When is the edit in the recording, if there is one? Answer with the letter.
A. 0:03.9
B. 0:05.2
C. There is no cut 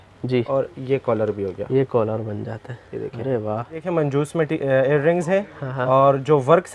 A